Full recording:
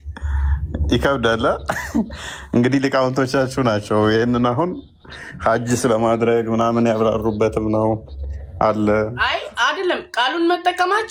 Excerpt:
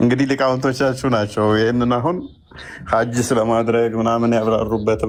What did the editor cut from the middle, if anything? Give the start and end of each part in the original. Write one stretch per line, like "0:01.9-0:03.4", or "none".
none